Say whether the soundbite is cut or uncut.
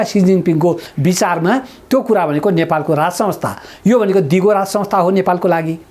uncut